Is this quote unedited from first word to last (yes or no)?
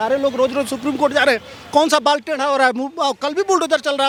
yes